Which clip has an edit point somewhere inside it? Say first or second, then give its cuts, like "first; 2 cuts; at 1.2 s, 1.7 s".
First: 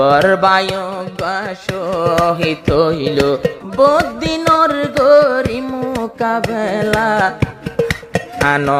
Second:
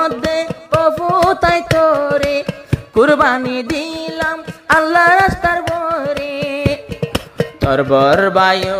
first; 1 cut; at 3.6 s